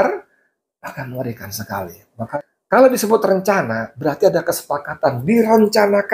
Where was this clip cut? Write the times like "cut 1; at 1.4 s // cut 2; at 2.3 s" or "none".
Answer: cut 1; at 2.2 s